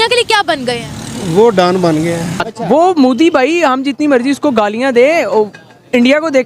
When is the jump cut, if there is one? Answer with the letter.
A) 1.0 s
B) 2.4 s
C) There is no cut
B